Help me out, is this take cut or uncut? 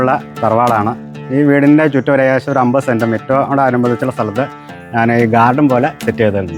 uncut